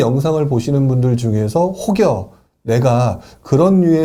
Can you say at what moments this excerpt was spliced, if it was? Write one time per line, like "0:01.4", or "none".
none